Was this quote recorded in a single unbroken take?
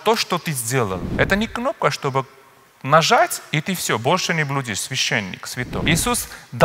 no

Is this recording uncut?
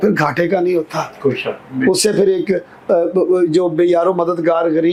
yes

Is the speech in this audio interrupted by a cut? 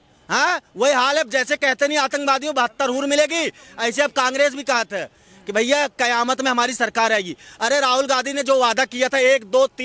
no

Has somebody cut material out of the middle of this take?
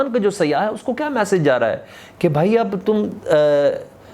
no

